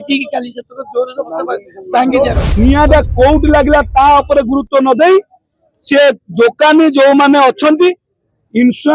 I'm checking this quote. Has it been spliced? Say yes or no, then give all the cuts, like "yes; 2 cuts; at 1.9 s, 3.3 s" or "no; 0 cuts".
yes; 1 cut; at 2.4 s